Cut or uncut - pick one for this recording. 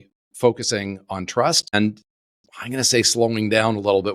cut